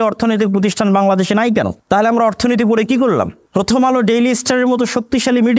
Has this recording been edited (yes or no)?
yes